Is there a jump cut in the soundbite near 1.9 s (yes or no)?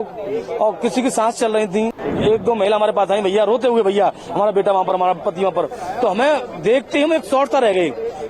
yes